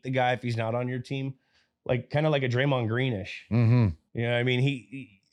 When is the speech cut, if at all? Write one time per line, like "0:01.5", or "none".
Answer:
none